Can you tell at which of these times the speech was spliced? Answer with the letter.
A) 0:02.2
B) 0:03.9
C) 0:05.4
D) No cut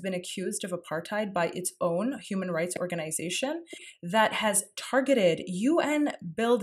B